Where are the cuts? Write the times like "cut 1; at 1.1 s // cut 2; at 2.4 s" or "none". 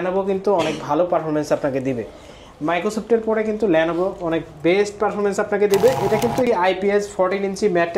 cut 1; at 6.5 s

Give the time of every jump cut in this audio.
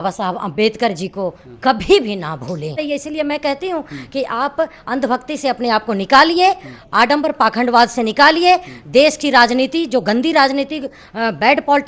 cut 1; at 2.8 s

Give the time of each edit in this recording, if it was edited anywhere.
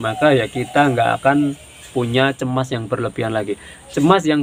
none

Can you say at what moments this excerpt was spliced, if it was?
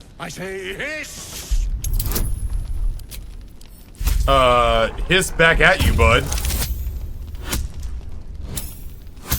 cut 1; at 1.3 s

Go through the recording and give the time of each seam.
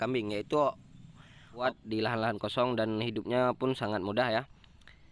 cut 1; at 1.6 s

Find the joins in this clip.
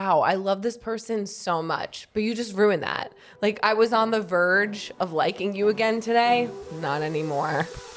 none

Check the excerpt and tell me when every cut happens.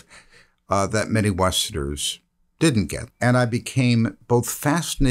cut 1; at 3.0 s

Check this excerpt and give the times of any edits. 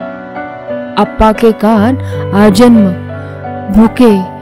cut 1; at 0.9 s

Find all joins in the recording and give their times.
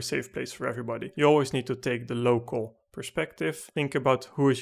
cut 1; at 1.1 s // cut 2; at 3.6 s

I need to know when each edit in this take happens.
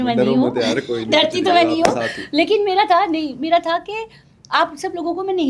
none

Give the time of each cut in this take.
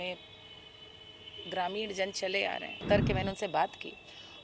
cut 1; at 2.8 s

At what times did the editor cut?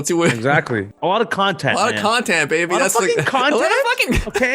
cut 1; at 0.9 s

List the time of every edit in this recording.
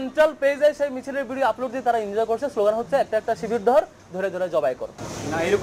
none

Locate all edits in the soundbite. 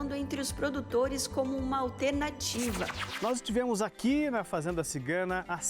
cut 1; at 3.0 s

